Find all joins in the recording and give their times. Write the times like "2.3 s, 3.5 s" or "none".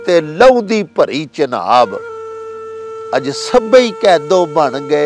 none